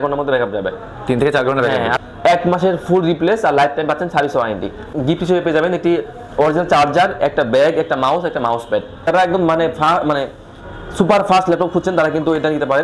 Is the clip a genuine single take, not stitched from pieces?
no; 3 cuts; at 1.9 s, 4.9 s, 9.1 s

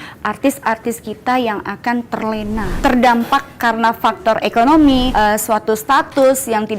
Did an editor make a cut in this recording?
yes; 2 cuts; at 2.7 s, 5.1 s

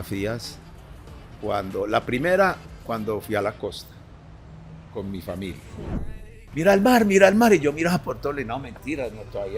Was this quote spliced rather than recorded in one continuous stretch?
yes; 1 cut; at 6.2 s

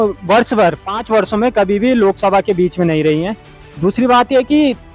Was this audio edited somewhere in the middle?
no; 0 cuts

